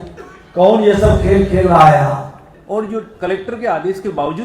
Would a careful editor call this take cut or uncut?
cut